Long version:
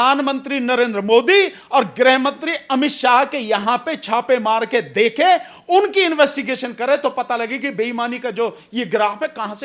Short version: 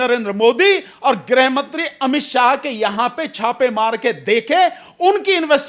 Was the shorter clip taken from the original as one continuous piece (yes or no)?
yes